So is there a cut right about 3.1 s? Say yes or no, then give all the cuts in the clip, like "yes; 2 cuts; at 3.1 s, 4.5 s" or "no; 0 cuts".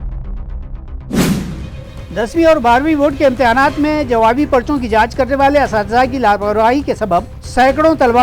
no; 1 cut; at 1.6 s